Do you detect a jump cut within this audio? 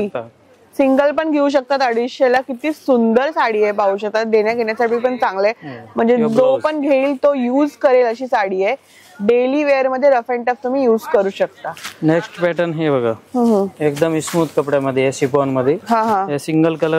no; 0 cuts

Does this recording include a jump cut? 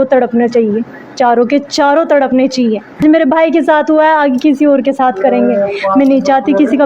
yes; 1 cut; at 3.0 s

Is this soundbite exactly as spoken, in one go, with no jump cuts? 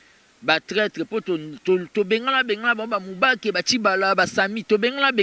yes; 0 cuts

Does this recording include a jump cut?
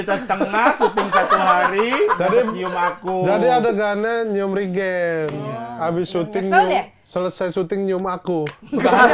no; 0 cuts

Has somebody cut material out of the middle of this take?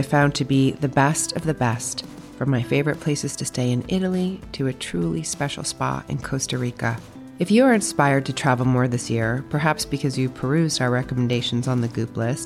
no; 0 cuts

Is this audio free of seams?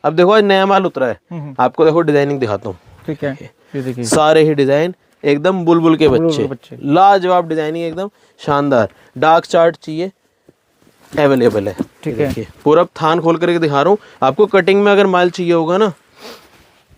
yes; 0 cuts

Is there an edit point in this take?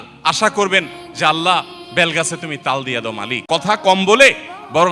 yes; 1 cut; at 3.3 s

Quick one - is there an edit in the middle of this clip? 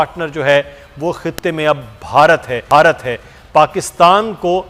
no; 0 cuts

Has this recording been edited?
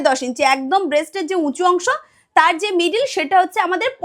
no; 0 cuts

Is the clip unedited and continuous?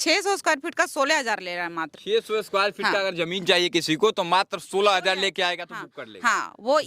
yes; 0 cuts

